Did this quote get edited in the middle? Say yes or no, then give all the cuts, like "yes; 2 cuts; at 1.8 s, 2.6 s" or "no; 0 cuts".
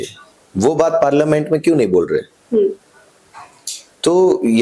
no; 0 cuts